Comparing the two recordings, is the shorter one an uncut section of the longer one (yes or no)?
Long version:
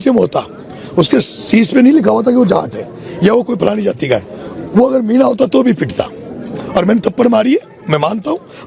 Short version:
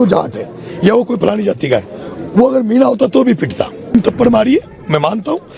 no